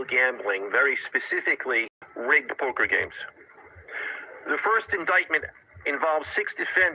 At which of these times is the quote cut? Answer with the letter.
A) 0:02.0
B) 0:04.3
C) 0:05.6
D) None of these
A